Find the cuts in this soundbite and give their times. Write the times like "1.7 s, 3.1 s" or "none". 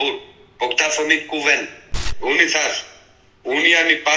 2.0 s

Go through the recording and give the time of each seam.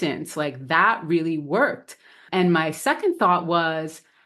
2.2 s

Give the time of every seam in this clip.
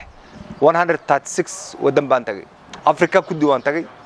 none

